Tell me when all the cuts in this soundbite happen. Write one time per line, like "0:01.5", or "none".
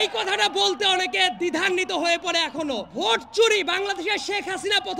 0:02.9